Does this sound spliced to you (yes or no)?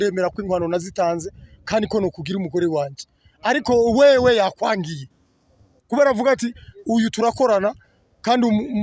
no